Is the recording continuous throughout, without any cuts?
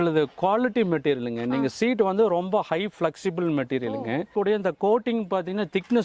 no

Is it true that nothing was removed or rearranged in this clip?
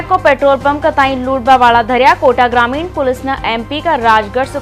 yes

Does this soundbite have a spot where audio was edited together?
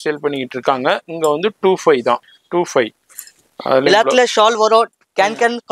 yes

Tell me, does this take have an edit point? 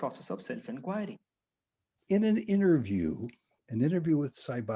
yes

